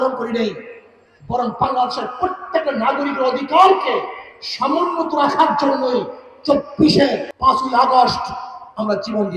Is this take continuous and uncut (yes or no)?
no